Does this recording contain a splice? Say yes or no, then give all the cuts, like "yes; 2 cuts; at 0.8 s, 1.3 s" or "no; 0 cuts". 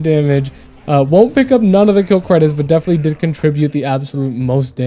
no; 0 cuts